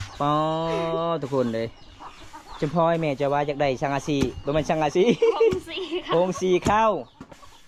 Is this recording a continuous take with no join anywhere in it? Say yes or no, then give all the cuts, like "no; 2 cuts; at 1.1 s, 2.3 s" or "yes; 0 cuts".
yes; 0 cuts